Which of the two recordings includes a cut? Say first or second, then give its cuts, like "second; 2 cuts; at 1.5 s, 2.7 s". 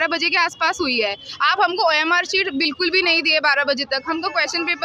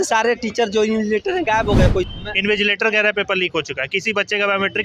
second; 1 cut; at 2.1 s